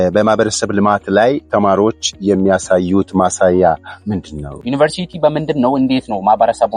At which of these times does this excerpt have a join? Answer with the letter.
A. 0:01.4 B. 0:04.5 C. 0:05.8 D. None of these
B